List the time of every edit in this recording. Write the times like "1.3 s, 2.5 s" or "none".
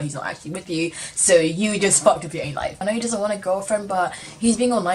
2.8 s